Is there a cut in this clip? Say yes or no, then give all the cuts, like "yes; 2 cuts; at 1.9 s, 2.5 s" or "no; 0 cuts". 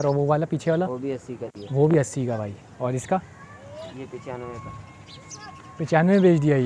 no; 0 cuts